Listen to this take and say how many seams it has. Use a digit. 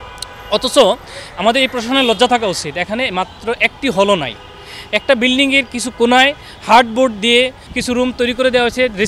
1